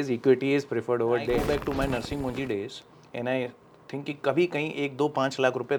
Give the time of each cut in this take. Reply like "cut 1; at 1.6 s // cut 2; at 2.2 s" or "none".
cut 1; at 1.5 s